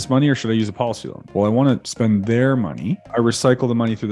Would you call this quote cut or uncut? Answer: cut